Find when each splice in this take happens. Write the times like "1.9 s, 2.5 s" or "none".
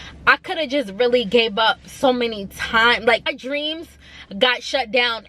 3.3 s